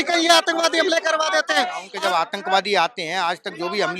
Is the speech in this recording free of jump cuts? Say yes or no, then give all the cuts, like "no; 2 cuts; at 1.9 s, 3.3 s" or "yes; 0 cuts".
no; 1 cut; at 1.9 s